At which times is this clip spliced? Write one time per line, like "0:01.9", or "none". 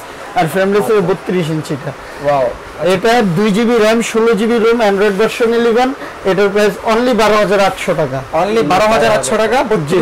none